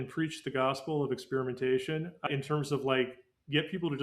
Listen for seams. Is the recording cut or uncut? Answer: cut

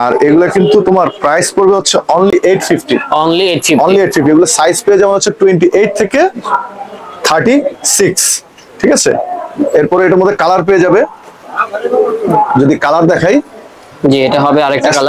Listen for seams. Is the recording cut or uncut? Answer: uncut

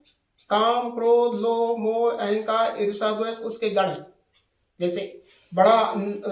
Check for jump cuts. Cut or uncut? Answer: uncut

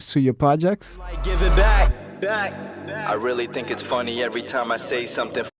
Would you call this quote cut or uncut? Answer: cut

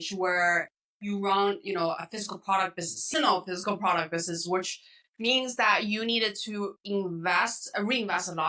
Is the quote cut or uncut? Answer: uncut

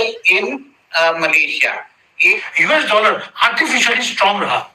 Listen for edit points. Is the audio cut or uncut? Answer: cut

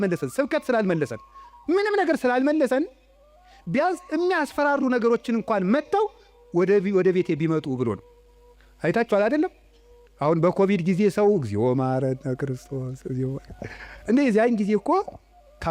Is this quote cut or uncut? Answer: uncut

